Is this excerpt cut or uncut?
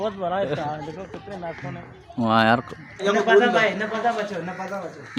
cut